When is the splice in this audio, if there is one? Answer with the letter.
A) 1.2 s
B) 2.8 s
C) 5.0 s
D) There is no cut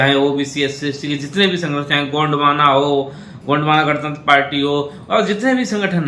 D